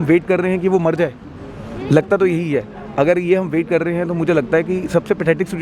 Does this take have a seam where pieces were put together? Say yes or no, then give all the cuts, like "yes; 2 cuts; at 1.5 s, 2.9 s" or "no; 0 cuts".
no; 0 cuts